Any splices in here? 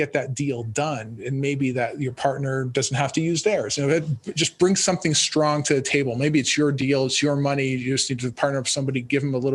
no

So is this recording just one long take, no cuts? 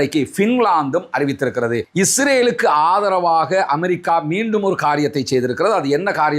no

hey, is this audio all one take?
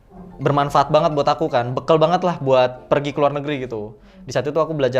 yes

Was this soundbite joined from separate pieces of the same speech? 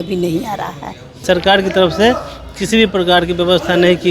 yes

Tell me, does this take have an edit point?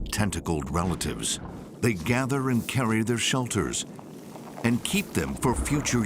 yes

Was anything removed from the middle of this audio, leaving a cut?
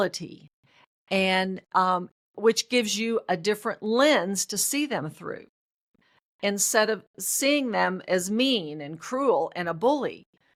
no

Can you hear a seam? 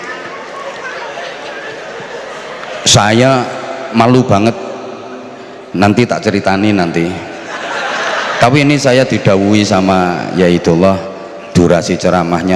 no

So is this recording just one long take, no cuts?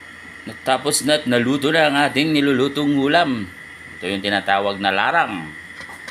yes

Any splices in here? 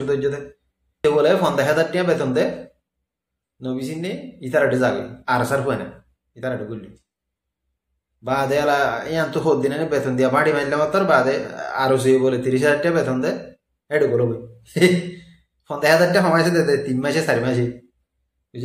yes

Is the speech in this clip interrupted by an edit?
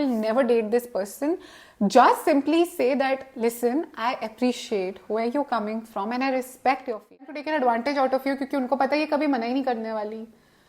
yes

